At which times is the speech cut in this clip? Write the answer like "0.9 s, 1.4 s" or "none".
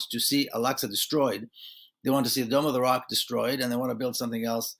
none